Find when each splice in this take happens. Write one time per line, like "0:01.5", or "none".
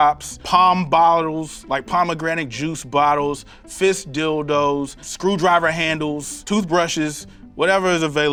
none